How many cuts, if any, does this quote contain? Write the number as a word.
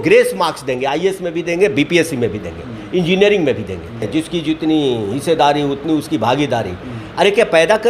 one